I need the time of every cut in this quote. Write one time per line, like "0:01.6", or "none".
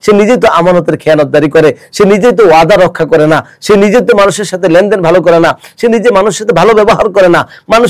none

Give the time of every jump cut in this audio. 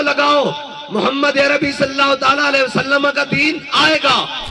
none

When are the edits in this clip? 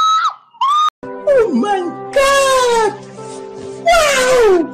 none

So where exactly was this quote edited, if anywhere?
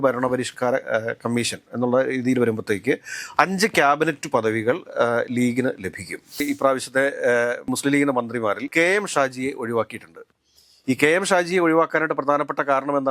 0:06.4

